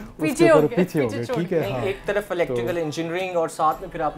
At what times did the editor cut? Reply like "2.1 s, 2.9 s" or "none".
none